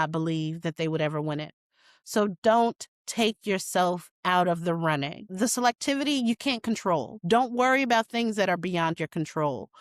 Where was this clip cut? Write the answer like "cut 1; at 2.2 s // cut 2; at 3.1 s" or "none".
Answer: cut 1; at 5.3 s // cut 2; at 7.1 s